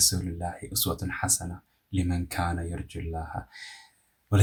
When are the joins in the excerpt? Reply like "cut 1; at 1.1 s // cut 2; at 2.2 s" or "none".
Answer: none